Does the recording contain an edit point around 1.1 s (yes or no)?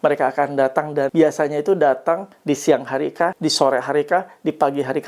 yes